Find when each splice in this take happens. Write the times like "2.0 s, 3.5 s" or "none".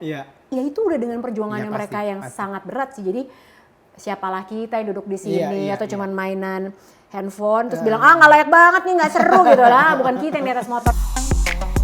10.9 s